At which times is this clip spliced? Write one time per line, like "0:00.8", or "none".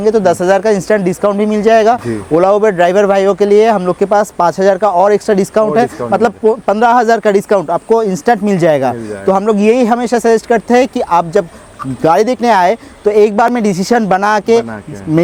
none